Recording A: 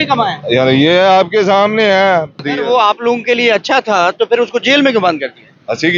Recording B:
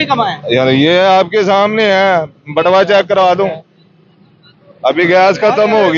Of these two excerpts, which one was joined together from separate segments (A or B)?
A